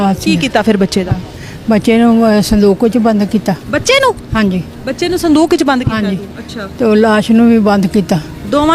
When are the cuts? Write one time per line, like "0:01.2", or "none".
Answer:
none